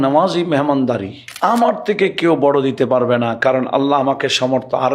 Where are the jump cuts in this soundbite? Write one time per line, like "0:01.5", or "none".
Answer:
0:01.3